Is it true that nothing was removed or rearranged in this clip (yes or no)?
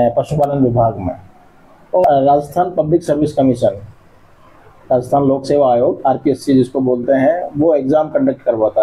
no